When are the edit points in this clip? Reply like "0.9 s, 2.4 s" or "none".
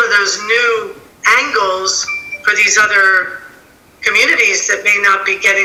none

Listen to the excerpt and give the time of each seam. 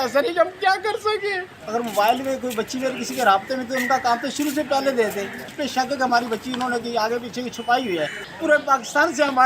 1.5 s, 5.6 s, 8.2 s

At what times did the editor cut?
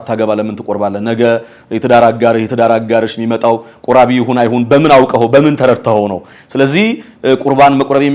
none

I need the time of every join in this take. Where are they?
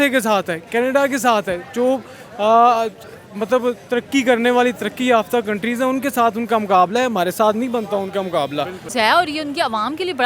8.9 s

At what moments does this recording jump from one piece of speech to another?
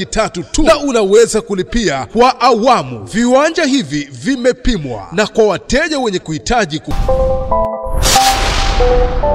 7.0 s

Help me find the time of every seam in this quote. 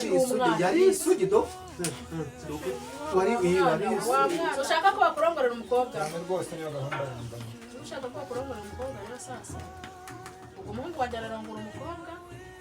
4.5 s

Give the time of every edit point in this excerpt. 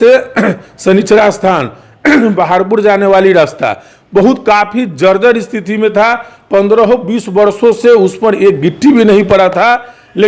none

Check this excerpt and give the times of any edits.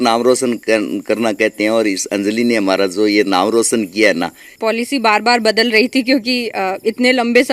4.5 s

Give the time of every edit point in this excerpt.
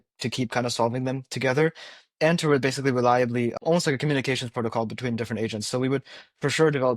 3.6 s

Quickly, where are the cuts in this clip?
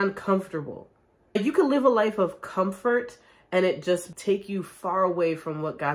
1.4 s, 4.1 s

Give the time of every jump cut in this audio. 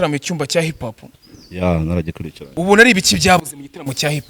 2.4 s

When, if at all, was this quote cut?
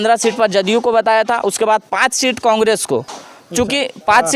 none

